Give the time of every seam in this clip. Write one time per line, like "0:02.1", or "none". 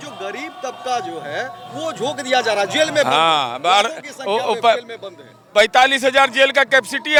none